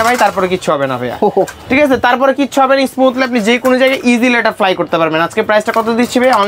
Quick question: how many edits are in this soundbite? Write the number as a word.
zero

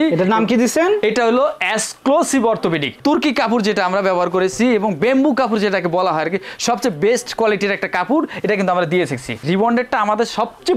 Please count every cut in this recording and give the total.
two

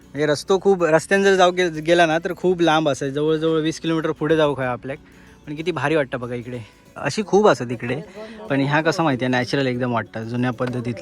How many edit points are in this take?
one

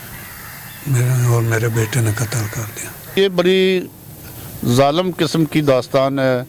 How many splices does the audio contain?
one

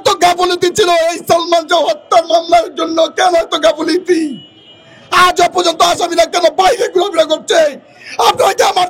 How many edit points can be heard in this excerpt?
zero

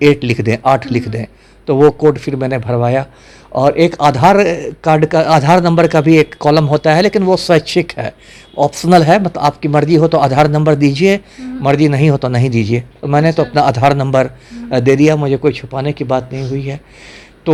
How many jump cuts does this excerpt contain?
zero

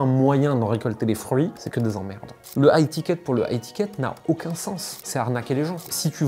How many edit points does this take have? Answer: one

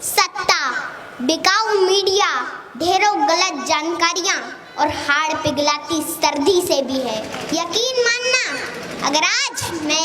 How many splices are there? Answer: one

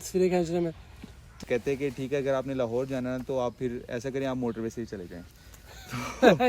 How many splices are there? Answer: one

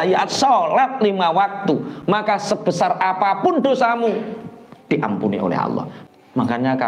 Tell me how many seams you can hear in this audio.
one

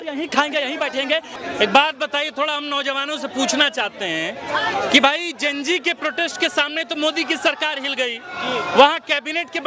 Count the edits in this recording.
one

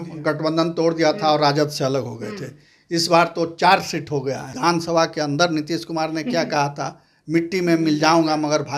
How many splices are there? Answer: one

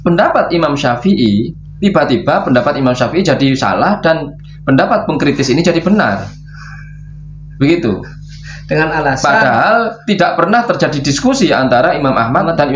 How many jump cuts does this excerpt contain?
zero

